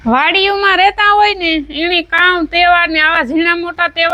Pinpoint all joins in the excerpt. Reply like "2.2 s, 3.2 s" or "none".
none